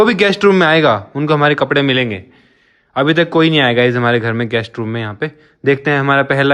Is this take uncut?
yes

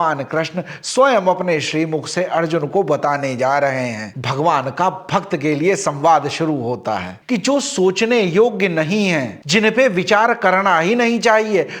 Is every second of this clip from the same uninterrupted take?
no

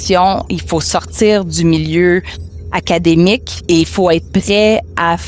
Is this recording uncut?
no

